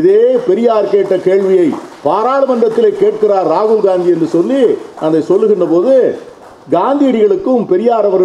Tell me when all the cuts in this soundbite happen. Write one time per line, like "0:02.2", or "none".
none